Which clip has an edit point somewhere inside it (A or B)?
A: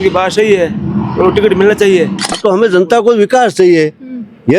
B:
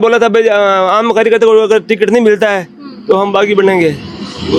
A